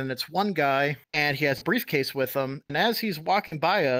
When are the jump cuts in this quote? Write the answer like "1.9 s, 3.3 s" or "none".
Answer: 1.0 s